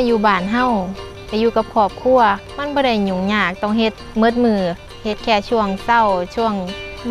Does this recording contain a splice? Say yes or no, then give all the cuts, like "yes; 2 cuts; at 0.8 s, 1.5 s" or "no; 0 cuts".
yes; 1 cut; at 2.5 s